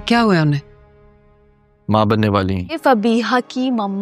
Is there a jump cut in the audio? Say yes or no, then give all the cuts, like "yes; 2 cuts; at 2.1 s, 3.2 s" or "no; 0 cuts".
yes; 1 cut; at 2.8 s